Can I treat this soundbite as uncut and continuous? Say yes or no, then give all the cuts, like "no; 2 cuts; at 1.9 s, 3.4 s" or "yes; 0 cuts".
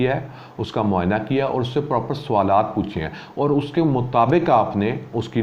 yes; 0 cuts